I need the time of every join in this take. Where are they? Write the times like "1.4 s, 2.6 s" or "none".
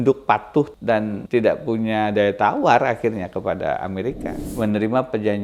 1.1 s, 4.5 s